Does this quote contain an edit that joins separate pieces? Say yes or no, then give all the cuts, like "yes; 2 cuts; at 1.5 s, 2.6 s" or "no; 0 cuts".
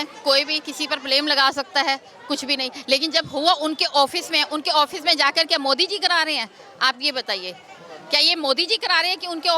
no; 0 cuts